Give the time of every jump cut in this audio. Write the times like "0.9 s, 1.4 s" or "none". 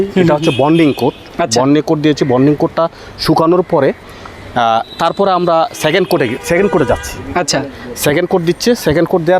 none